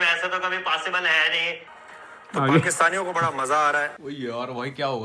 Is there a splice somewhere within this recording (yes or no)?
yes